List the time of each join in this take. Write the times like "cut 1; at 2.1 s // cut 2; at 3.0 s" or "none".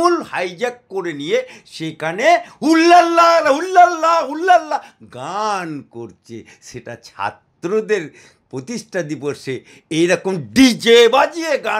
none